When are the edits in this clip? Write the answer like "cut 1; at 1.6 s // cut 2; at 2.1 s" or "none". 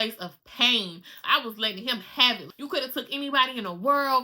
cut 1; at 1.2 s // cut 2; at 2.5 s